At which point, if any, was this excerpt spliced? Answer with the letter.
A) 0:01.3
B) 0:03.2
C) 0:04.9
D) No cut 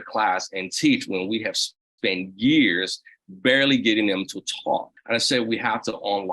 C